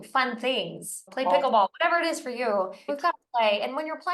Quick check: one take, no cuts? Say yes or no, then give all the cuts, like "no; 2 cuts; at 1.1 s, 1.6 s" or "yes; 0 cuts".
no; 2 cuts; at 1.1 s, 2.9 s